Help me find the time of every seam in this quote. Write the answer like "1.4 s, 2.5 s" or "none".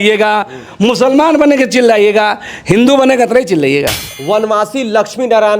4.1 s